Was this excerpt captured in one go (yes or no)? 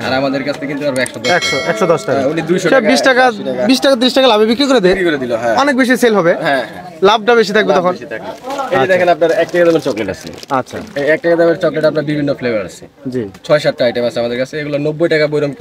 yes